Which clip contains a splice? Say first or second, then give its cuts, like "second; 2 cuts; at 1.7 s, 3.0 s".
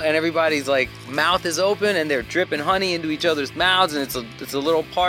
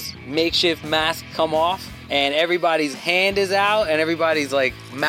second; 1 cut; at 1.9 s